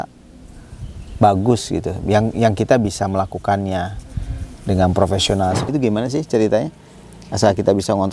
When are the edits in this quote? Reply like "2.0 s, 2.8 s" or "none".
5.7 s